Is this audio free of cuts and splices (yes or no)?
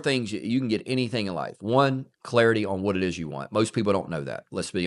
yes